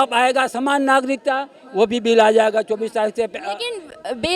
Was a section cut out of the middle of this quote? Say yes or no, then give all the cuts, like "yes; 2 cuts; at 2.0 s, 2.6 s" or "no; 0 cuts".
no; 0 cuts